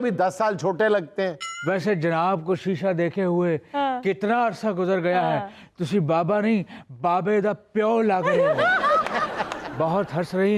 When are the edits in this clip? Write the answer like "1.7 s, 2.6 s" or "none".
1.5 s